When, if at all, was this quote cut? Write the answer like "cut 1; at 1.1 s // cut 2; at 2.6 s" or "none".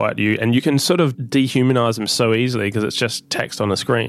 cut 1; at 1.2 s